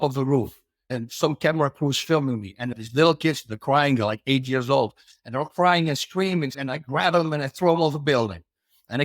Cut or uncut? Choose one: cut